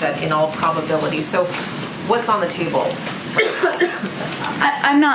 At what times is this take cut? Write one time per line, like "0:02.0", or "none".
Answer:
none